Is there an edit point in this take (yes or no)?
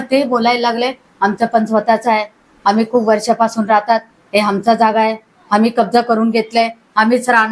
no